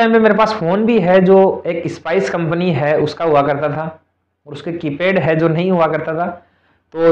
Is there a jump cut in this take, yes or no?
no